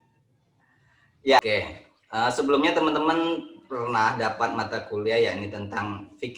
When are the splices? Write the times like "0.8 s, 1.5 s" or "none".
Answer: 1.4 s